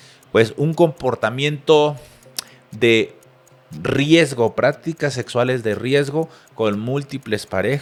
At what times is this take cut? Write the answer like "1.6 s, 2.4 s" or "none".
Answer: none